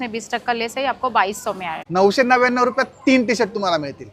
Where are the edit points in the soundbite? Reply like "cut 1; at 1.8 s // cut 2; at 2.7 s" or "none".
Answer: cut 1; at 1.7 s